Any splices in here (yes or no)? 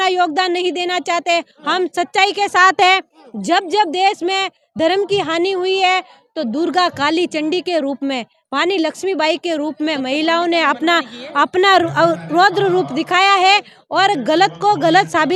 no